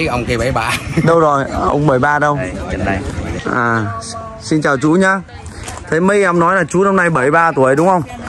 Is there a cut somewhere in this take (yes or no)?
yes